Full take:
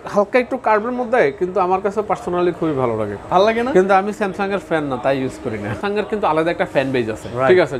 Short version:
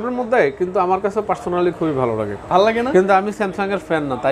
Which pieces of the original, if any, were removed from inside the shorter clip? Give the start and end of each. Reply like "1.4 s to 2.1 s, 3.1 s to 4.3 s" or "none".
none